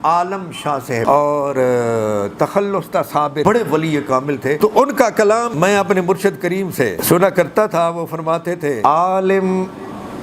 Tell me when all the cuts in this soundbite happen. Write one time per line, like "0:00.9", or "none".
0:01.1
0:03.4
0:04.6
0:05.5
0:07.0
0:08.8